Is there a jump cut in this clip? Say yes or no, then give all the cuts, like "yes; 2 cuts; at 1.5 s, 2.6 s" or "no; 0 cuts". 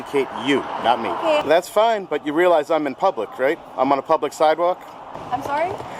yes; 2 cuts; at 1.4 s, 5.0 s